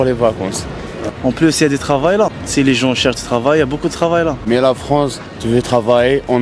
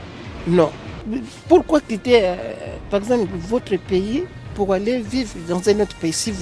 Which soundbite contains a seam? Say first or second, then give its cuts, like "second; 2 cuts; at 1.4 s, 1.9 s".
first; 3 cuts; at 0.9 s, 2.4 s, 4.4 s